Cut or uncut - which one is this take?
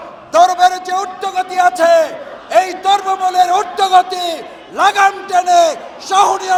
uncut